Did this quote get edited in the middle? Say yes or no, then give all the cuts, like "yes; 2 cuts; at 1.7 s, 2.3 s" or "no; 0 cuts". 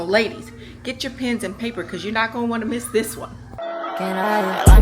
yes; 1 cut; at 3.4 s